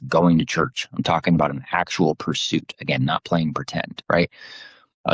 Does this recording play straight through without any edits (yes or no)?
yes